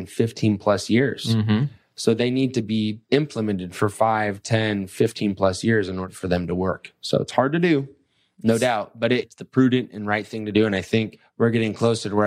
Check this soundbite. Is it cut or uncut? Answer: cut